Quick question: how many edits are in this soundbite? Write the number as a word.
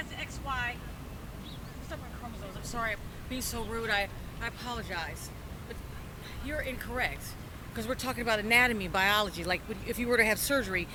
zero